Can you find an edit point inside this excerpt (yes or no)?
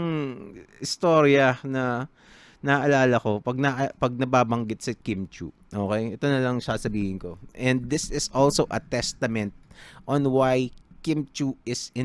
no